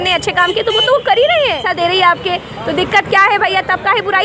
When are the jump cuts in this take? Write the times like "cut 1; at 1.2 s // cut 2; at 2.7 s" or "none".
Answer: cut 1; at 1.7 s